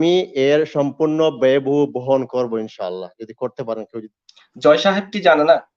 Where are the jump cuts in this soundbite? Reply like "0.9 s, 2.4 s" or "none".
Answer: 4.0 s